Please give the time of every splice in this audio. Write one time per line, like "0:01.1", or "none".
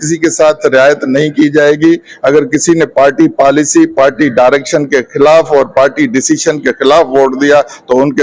none